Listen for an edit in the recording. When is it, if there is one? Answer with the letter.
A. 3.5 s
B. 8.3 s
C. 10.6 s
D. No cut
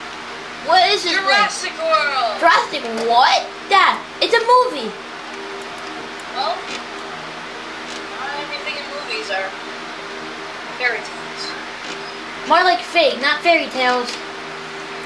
B